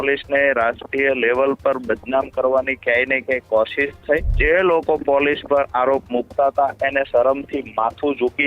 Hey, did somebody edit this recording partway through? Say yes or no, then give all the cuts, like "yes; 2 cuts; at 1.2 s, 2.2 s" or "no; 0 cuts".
yes; 1 cut; at 4.3 s